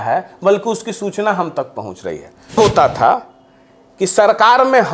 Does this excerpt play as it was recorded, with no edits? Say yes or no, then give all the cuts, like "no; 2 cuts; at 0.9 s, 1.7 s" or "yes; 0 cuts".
no; 1 cut; at 2.6 s